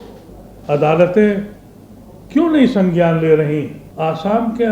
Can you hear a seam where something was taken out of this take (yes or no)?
yes